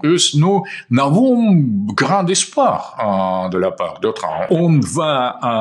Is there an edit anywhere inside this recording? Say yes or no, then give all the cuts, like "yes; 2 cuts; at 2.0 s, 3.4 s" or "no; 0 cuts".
yes; 1 cut; at 4.5 s